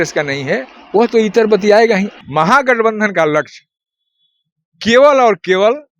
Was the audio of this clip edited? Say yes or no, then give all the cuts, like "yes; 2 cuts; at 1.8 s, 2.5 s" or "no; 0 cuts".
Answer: yes; 1 cut; at 2.1 s